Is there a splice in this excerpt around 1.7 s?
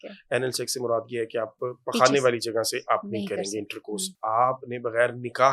no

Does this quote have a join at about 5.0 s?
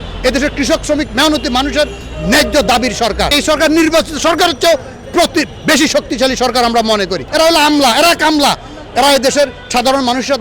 no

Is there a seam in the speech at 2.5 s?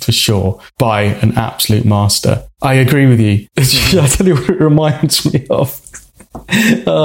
yes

